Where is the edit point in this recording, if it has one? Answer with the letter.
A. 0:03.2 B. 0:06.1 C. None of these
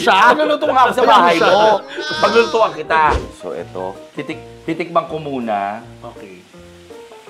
A